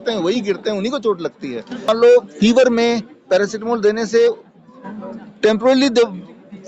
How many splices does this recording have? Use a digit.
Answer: 1